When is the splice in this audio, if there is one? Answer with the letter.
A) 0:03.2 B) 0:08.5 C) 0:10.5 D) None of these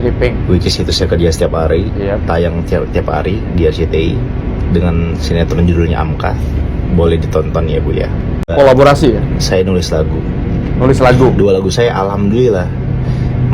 B